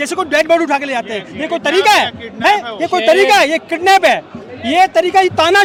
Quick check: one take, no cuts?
yes; 0 cuts

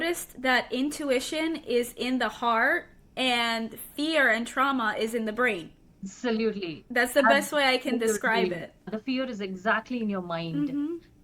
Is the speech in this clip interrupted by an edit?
yes; 1 cut; at 8.9 s

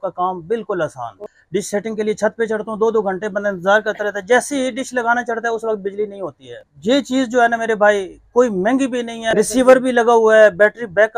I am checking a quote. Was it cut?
yes; 3 cuts; at 1.2 s, 6.7 s, 9.2 s

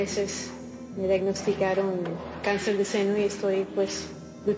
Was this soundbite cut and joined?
no; 0 cuts

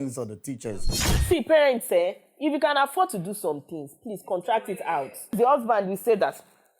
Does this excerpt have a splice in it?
yes; 2 cuts; at 1.0 s, 5.3 s

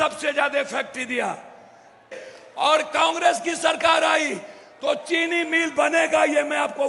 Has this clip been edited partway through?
yes; 1 cut; at 2.2 s

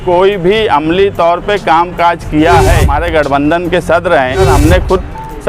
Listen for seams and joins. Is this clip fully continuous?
no; 2 cuts; at 2.9 s, 4.5 s

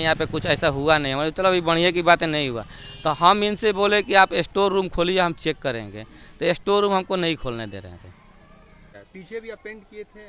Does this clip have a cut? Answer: yes; 1 cut; at 8.9 s

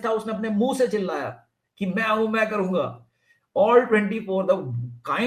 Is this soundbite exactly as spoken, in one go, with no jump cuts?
yes; 0 cuts

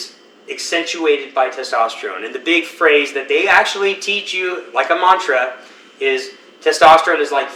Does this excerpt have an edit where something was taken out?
no; 0 cuts

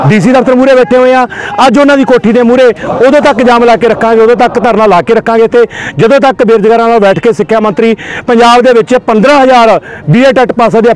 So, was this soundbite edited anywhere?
no; 0 cuts

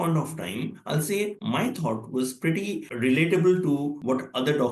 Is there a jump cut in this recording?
yes; 1 cut; at 2.8 s

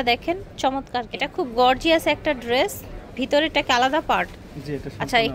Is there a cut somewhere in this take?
yes; 1 cut; at 1.3 s

